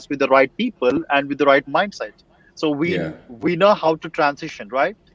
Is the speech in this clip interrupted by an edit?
no; 0 cuts

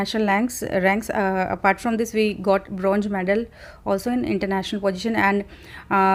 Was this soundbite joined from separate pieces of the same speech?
no; 0 cuts

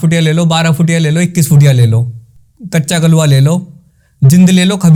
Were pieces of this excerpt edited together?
no; 0 cuts

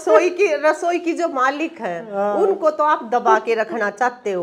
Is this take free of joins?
yes; 0 cuts

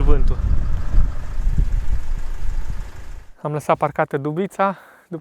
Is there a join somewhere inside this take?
yes; 1 cut; at 3.3 s

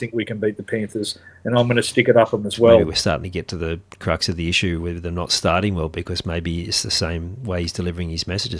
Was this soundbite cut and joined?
yes; 1 cut; at 2.9 s

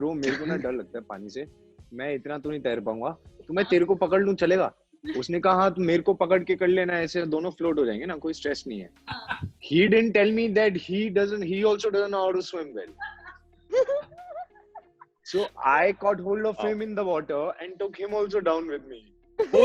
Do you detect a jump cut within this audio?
no; 0 cuts

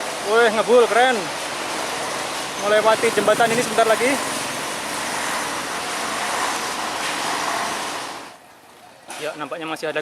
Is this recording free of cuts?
no; 1 cut; at 8.2 s

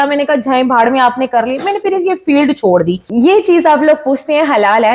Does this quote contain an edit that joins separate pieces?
yes; 1 cut; at 3.0 s

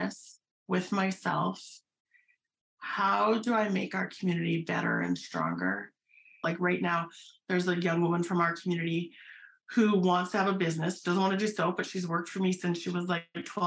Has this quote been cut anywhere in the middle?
yes; 1 cut; at 6.3 s

